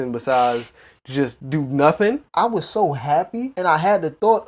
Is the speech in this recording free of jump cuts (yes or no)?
no